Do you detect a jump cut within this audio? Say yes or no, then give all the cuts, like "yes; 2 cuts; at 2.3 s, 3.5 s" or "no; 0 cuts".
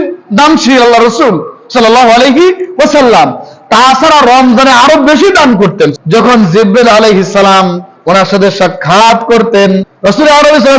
yes; 2 cuts; at 5.9 s, 9.9 s